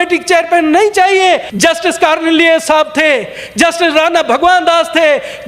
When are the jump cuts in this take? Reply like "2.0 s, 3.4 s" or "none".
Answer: 1.5 s